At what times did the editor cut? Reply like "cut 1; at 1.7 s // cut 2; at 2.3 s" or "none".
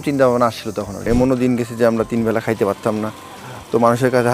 cut 1; at 1.1 s